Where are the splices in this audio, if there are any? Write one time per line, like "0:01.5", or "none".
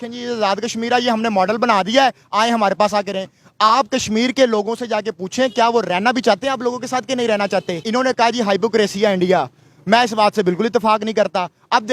0:07.8